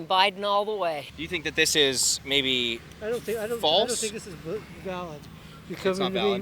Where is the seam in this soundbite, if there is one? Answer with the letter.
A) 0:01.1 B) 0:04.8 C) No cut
A